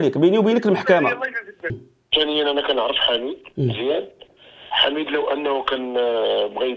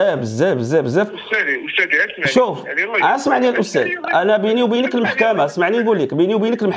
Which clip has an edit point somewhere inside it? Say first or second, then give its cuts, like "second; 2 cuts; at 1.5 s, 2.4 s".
first; 1 cut; at 1.9 s